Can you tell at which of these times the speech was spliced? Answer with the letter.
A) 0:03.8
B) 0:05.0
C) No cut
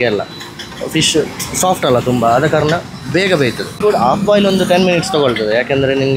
A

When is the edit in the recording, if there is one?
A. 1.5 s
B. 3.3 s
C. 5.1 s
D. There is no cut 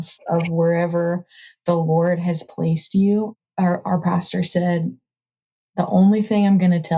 B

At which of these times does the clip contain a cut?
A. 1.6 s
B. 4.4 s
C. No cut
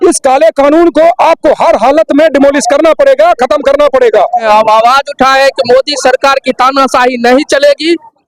B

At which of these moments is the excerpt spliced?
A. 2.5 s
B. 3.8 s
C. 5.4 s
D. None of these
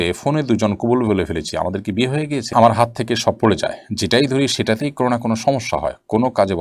A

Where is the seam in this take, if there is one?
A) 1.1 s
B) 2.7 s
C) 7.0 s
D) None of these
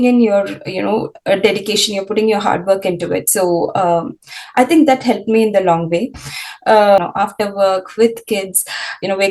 C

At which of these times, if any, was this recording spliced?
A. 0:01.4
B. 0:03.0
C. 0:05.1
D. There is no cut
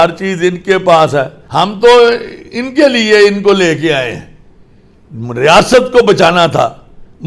A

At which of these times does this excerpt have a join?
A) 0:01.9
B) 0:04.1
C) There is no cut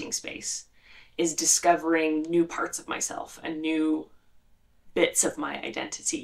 C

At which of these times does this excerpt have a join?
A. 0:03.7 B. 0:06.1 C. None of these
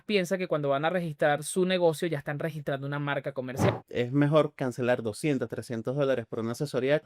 A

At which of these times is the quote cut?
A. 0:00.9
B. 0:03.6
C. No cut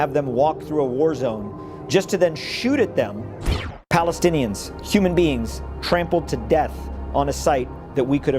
B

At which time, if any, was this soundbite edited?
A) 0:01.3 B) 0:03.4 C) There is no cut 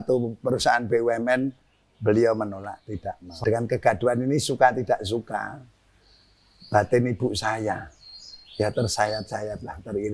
B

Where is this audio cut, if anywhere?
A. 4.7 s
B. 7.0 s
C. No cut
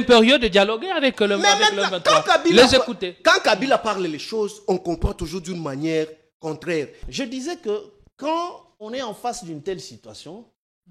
B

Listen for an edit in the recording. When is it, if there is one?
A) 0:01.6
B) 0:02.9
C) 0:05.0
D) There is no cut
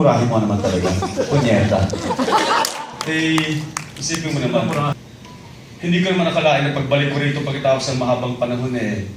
B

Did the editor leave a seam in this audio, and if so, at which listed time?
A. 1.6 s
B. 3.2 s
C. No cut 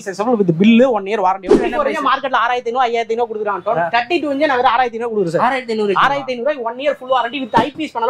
A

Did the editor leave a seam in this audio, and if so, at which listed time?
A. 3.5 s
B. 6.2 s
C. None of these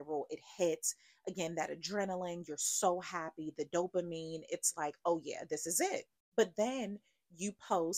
B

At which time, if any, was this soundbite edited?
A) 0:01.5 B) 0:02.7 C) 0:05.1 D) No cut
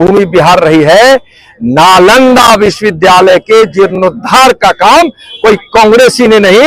D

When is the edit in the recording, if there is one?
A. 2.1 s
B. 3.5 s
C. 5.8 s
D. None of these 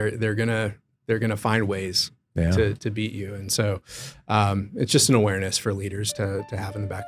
D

